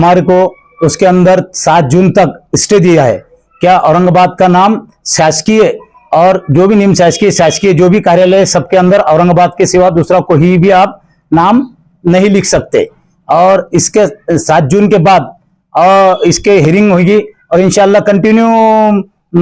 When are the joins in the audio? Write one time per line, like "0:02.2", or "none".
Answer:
none